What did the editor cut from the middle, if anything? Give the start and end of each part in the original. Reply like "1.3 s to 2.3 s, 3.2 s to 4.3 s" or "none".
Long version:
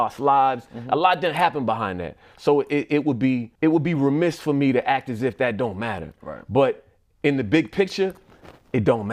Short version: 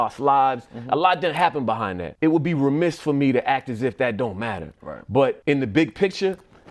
2.1 s to 3.5 s, 6.8 s to 7.2 s